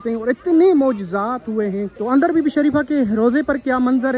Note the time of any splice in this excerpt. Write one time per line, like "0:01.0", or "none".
0:01.9